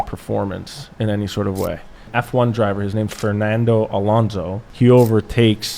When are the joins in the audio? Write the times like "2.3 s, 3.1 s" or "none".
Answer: 2.0 s, 3.1 s, 4.6 s